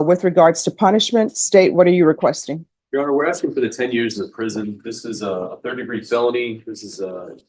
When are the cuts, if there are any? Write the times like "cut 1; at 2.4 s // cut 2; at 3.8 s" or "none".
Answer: none